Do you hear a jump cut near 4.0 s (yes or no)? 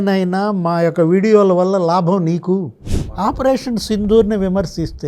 no